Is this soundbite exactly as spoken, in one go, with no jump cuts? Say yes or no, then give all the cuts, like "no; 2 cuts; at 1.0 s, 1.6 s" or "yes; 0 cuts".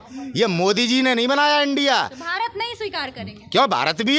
yes; 0 cuts